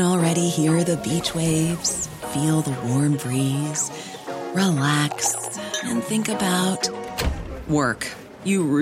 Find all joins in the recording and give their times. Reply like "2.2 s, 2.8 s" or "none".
none